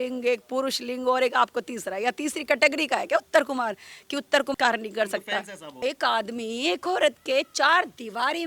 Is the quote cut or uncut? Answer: cut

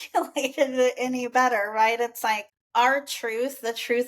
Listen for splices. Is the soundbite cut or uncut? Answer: cut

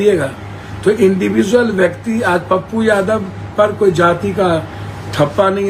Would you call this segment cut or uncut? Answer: uncut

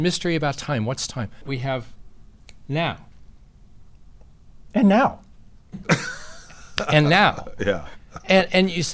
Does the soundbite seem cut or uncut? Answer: cut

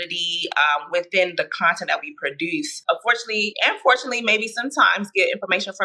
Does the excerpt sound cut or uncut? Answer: cut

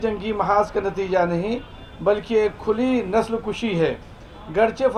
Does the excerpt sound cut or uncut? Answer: uncut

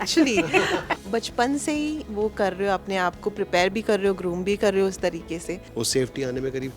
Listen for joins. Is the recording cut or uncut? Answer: cut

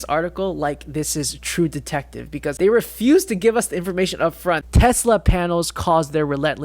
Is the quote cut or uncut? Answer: cut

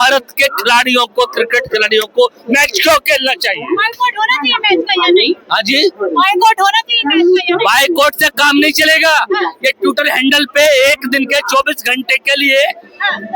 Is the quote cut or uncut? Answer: uncut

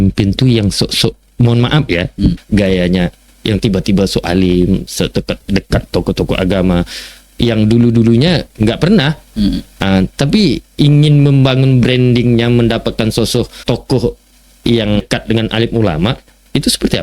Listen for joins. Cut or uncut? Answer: cut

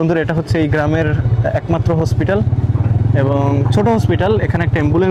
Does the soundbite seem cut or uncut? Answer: uncut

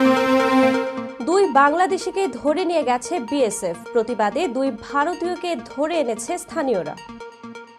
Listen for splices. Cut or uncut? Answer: cut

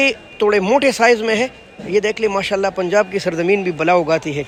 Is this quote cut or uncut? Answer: uncut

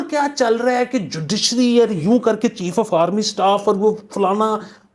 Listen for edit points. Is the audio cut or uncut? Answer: uncut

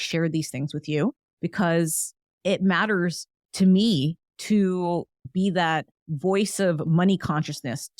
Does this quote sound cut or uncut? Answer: cut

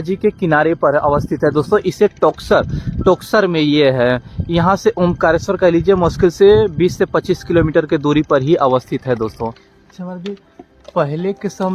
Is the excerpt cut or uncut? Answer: cut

